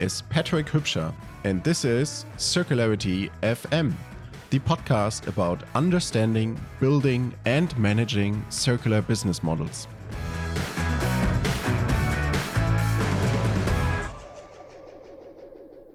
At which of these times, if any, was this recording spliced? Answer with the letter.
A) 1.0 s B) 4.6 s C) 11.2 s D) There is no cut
D